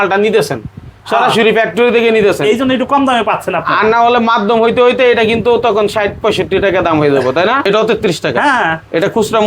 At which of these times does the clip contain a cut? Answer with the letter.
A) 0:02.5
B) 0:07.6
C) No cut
B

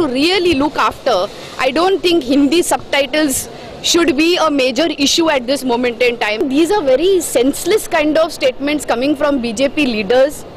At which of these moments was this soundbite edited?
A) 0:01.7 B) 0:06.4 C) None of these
B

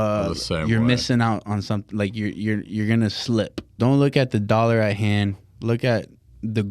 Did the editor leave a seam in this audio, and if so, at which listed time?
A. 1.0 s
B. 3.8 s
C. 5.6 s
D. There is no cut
B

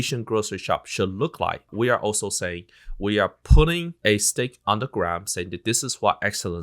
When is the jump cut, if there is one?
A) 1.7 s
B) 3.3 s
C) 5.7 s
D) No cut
A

